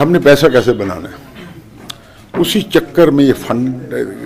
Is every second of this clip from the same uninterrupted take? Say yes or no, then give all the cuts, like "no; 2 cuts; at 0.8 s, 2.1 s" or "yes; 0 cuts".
yes; 0 cuts